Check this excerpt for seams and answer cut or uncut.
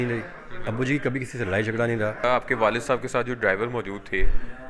cut